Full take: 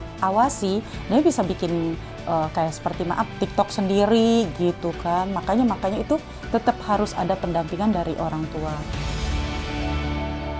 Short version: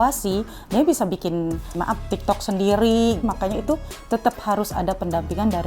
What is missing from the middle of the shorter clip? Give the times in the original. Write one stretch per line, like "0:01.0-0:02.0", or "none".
0:02.1-0:03.0
0:04.5-0:05.7